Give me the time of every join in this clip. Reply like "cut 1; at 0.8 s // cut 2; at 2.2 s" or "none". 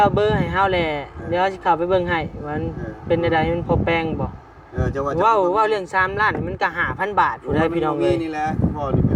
none